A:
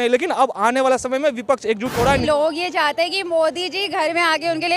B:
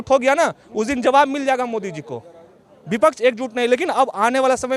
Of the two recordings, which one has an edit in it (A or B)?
A